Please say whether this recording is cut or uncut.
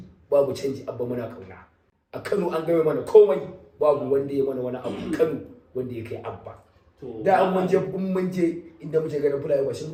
uncut